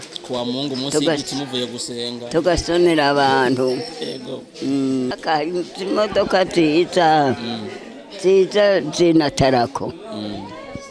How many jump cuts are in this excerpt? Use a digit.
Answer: 1